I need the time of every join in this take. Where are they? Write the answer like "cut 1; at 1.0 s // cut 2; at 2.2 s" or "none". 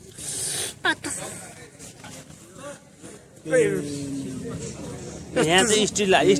none